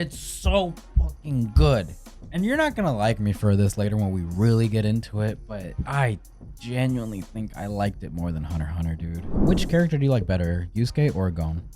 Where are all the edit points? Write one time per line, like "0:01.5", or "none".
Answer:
0:09.3